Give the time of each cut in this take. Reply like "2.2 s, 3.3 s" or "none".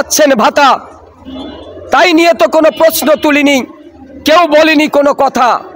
none